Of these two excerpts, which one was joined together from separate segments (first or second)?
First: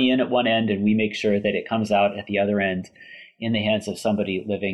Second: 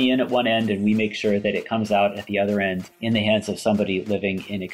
second